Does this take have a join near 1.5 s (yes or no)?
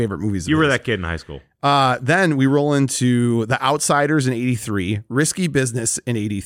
no